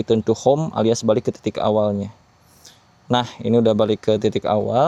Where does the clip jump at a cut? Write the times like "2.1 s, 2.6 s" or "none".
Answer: none